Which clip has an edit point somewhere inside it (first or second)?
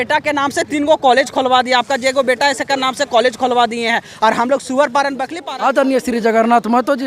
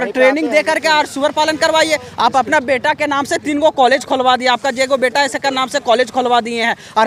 first